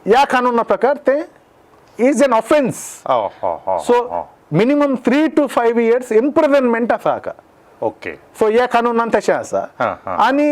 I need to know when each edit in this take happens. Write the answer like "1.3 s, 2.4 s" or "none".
none